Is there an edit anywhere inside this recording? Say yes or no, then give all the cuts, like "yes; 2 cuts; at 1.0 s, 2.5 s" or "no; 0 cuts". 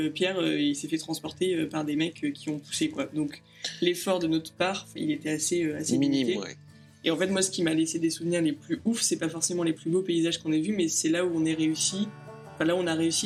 no; 0 cuts